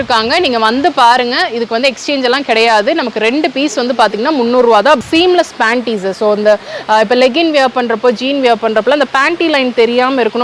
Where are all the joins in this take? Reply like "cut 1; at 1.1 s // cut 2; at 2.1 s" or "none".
cut 1; at 5.0 s